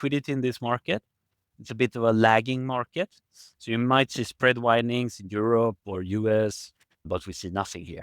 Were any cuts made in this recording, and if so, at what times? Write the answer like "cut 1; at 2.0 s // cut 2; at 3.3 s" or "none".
cut 1; at 7.1 s

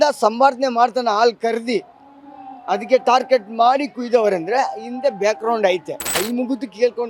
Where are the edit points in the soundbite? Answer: cut 1; at 6.1 s

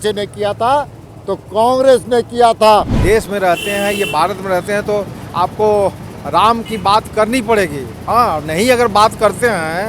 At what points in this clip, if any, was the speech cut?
cut 1; at 2.9 s

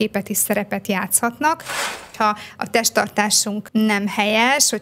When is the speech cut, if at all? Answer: cut 1; at 2.0 s

